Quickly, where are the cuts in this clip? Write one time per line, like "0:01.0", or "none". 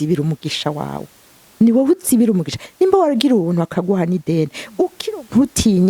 0:05.0